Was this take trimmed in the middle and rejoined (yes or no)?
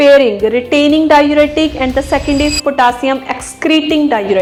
no